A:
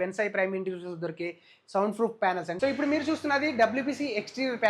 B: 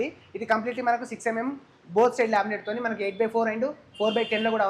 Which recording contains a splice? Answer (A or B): A